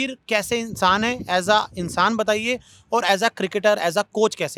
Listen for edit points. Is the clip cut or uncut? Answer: uncut